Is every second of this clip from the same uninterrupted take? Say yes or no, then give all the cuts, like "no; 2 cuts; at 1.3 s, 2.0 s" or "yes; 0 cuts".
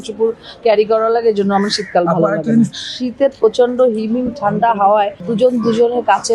no; 2 cuts; at 2.7 s, 5.3 s